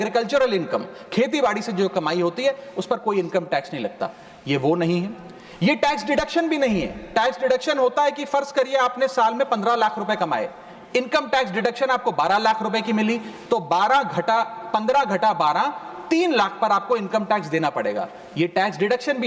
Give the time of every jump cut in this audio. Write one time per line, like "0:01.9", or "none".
none